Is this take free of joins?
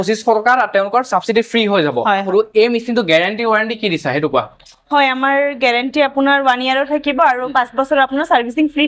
no; 1 cut; at 2.2 s

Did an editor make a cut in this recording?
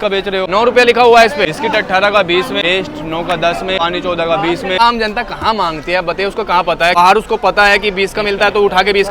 yes; 5 cuts; at 1.5 s, 2.6 s, 3.8 s, 4.8 s, 6.9 s

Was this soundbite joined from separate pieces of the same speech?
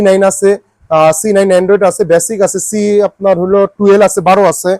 no; 0 cuts

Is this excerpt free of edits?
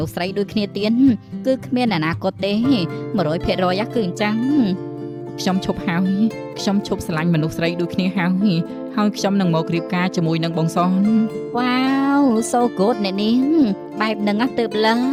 yes; 0 cuts

